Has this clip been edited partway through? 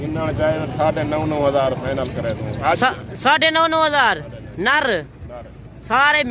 no; 0 cuts

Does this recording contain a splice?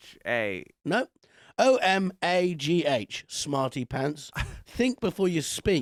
no; 0 cuts

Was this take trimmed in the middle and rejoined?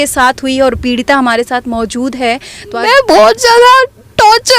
yes; 1 cut; at 2.8 s

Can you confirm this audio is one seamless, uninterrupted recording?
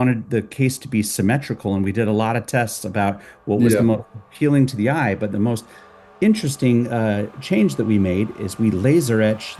yes; 0 cuts

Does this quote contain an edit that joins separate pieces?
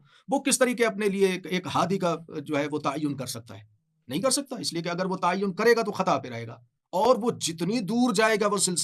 no; 0 cuts

